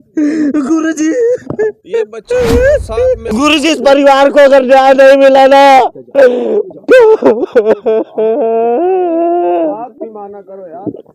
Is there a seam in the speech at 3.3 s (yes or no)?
yes